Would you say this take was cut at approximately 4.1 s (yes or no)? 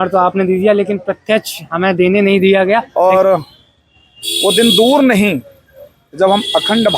no